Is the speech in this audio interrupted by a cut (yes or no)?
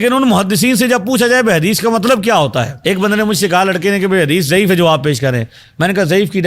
yes